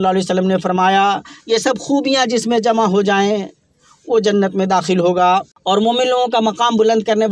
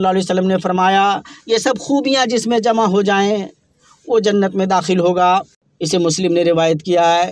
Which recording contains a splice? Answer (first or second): first